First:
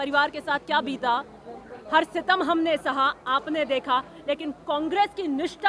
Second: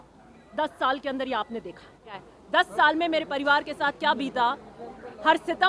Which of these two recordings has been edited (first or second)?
second